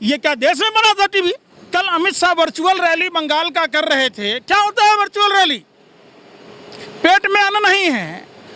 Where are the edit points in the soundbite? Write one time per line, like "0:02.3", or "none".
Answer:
0:01.5